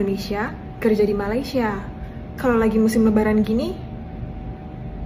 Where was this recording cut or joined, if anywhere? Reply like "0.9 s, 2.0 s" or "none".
none